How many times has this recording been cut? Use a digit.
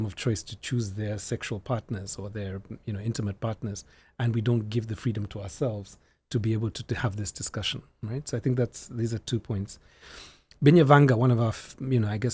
0